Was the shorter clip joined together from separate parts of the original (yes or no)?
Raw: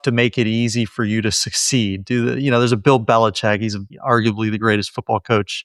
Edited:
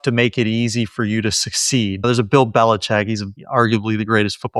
yes